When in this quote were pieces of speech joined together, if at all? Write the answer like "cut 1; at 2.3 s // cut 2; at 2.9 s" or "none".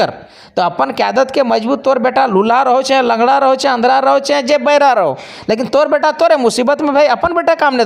none